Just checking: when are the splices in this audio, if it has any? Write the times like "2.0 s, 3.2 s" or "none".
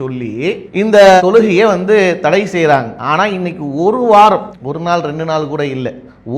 3.0 s